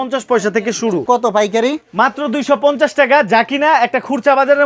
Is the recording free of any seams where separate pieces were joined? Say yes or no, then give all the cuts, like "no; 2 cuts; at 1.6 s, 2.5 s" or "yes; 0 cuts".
no; 1 cut; at 1.0 s